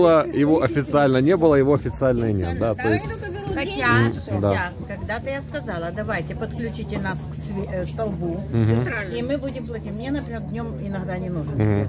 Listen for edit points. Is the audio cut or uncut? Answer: uncut